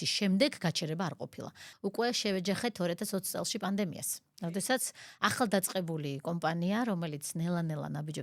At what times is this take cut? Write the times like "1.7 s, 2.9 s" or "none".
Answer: 1.6 s